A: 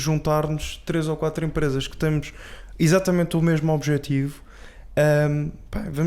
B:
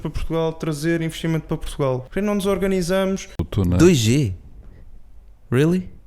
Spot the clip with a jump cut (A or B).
B